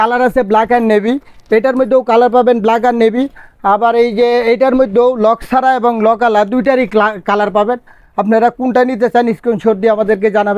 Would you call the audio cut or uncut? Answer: uncut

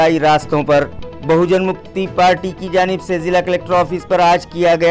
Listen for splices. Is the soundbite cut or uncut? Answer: uncut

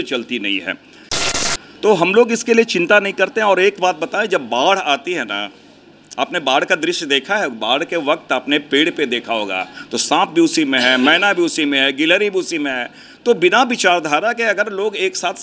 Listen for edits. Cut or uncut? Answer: cut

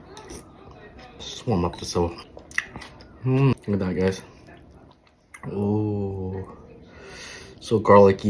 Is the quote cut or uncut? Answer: cut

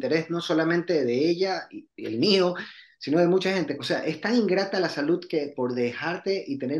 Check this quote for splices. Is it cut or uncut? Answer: cut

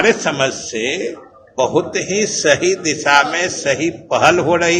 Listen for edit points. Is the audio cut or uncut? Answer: uncut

